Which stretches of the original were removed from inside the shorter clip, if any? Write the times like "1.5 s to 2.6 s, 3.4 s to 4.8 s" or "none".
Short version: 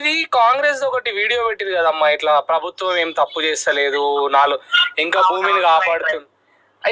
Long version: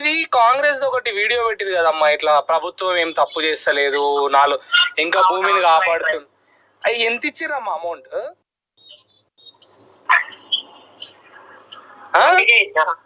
none